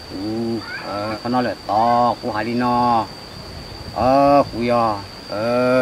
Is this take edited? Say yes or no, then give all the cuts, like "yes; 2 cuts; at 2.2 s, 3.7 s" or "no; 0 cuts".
yes; 1 cut; at 1.2 s